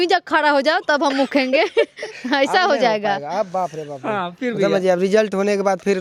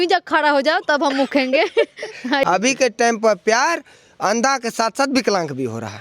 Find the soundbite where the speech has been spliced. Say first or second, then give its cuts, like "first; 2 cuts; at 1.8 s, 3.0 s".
second; 1 cut; at 2.5 s